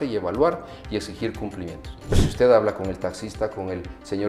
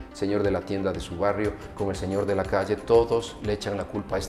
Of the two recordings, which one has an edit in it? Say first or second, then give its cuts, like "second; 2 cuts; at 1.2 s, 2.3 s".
first; 1 cut; at 2.1 s